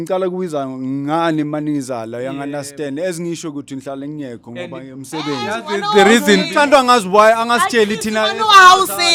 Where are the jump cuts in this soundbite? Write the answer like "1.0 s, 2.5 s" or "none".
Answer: none